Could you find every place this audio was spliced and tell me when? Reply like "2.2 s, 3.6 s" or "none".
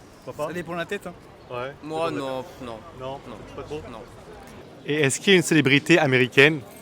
4.6 s